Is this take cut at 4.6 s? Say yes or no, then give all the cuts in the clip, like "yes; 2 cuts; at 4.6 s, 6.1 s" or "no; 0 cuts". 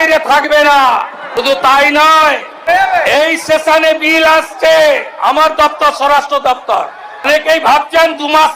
no; 3 cuts; at 1.4 s, 2.6 s, 7.3 s